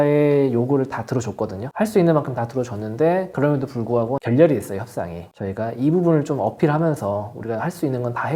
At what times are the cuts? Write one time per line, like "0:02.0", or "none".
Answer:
none